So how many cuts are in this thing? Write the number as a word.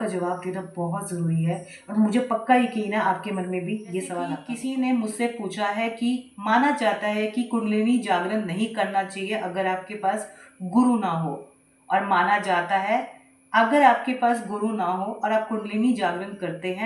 one